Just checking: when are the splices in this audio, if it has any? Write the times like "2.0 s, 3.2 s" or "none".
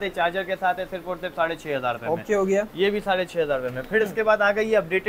none